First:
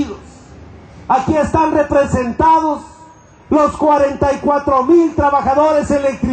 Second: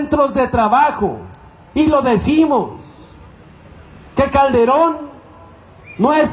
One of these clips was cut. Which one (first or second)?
first